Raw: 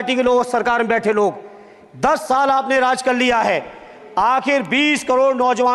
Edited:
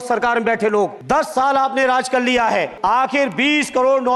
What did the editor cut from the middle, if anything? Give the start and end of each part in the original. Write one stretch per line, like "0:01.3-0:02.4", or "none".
0:01.4-0:01.9
0:03.7-0:04.1